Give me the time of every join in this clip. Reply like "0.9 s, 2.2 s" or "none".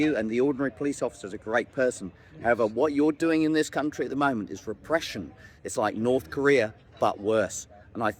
none